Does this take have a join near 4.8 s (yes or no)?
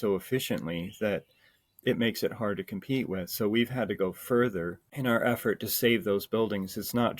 yes